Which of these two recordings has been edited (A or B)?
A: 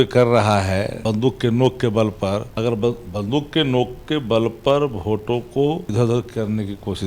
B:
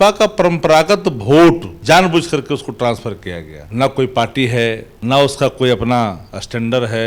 A